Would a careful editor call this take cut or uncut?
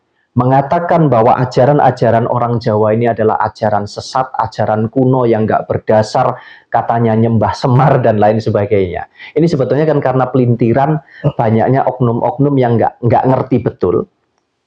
uncut